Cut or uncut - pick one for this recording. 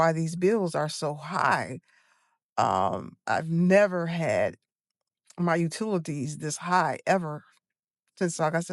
uncut